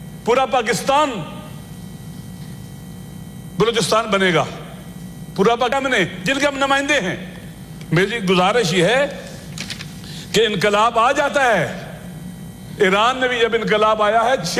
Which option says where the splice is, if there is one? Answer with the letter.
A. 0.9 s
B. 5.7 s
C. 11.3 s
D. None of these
B